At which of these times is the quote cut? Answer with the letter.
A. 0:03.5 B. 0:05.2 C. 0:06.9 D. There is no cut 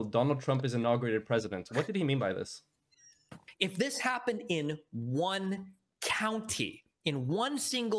A